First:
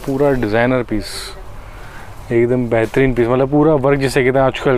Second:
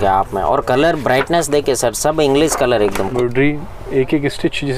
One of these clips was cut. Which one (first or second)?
second